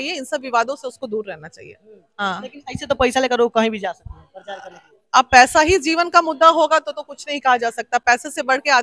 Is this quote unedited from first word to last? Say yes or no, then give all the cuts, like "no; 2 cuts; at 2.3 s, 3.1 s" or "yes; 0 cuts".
yes; 0 cuts